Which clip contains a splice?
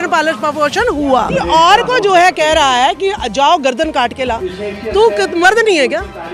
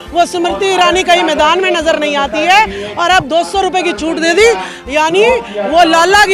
first; 1 cut; at 1.3 s

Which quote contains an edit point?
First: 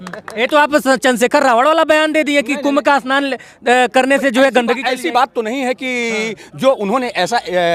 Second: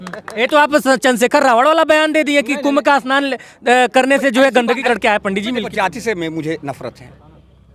second; 1 cut; at 4.8 s

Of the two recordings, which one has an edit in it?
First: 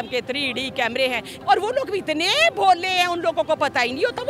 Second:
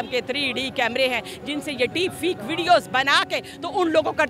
first; 1 cut; at 1.4 s

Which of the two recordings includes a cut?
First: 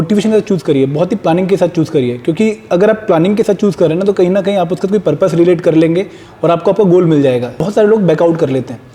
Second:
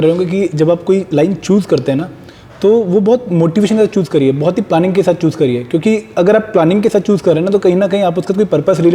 first; 1 cut; at 7.6 s

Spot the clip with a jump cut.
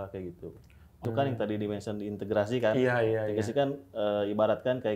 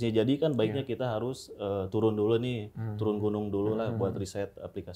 first; 1 cut; at 1.1 s

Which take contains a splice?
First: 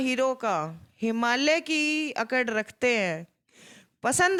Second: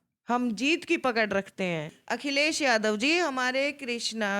second; 1 cut; at 1.9 s

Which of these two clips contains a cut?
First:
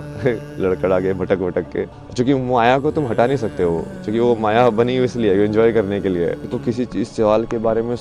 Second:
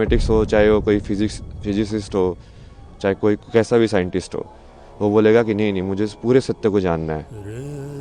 first; 2 cuts; at 2.0 s, 6.5 s

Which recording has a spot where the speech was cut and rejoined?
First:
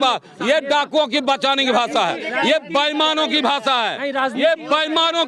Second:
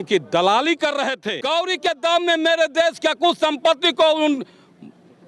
second; 1 cut; at 1.3 s

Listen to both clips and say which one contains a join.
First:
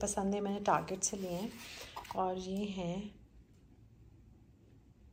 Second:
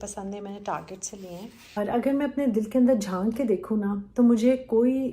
second; 1 cut; at 1.8 s

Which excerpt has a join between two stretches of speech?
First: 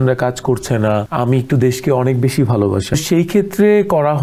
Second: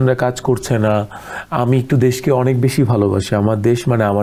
first; 2 cuts; at 1.1 s, 2.9 s

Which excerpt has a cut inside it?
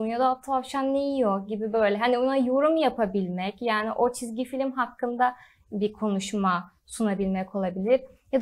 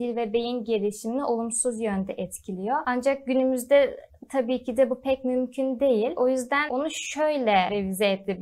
second; 3 cuts; at 2.8 s, 6.4 s, 7.7 s

